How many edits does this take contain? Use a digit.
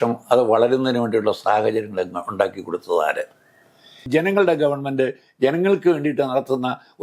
1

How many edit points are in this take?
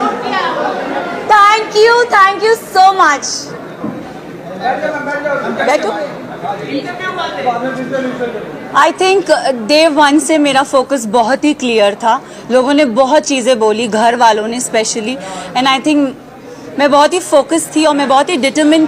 1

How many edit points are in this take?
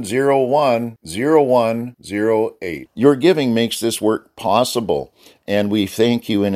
0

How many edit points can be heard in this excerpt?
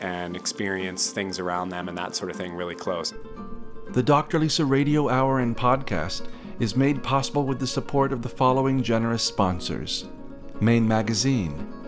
1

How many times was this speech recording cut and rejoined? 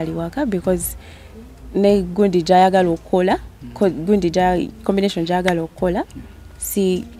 0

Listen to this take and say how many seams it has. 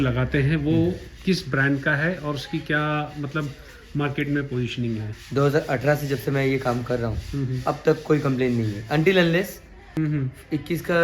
2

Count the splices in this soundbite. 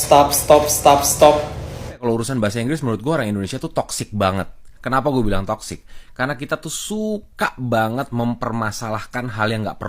1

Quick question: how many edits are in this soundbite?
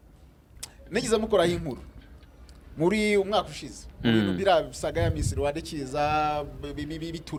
0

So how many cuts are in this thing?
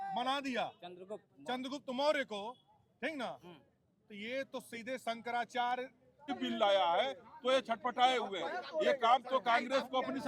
1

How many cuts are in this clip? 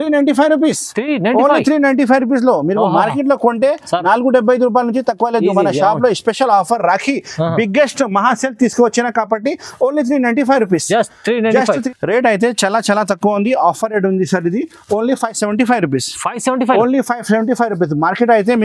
1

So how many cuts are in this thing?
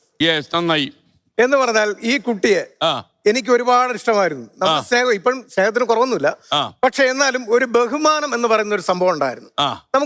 0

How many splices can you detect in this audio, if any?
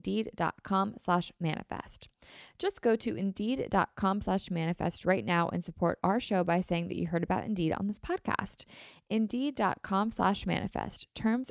0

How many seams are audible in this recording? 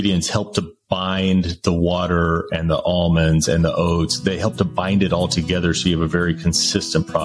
0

